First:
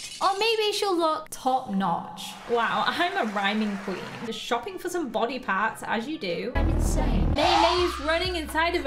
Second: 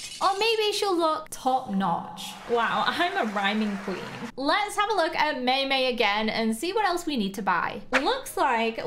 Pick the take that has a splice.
first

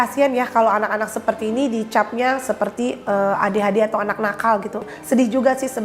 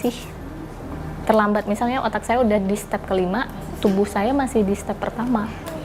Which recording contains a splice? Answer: first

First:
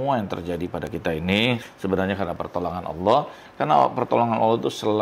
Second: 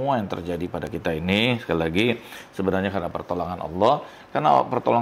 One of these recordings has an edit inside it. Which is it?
first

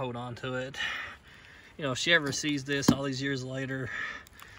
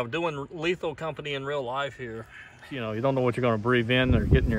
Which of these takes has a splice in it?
second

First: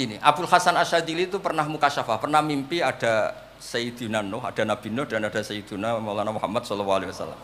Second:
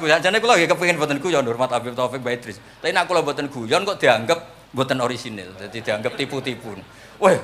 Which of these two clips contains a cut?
second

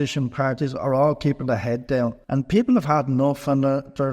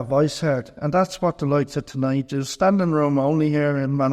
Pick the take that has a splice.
first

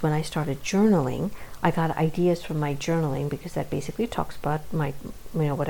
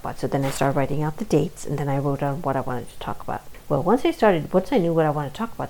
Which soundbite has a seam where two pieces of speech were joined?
second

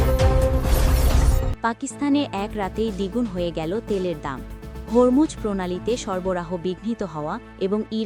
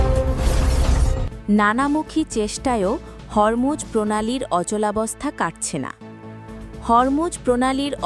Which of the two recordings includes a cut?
second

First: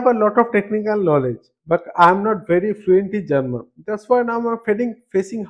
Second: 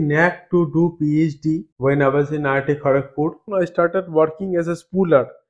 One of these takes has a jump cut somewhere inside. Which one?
second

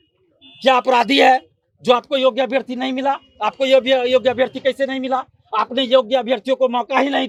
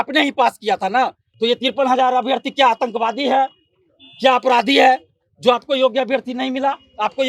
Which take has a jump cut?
second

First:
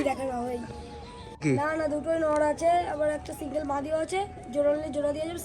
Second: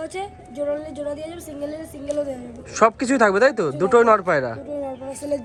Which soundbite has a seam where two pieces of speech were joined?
first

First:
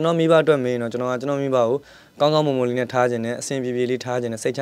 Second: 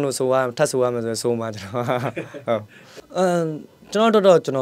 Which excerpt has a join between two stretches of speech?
second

